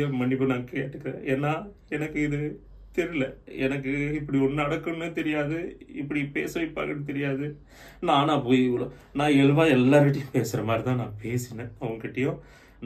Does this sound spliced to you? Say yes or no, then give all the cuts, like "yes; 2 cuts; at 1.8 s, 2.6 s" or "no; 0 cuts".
no; 0 cuts